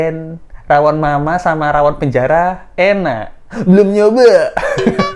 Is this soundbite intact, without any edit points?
yes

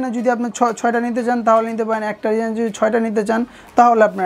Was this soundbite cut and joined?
no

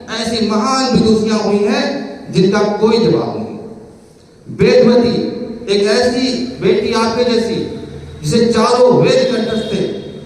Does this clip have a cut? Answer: no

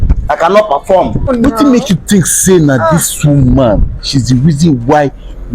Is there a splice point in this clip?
yes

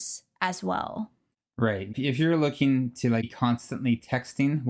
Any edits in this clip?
yes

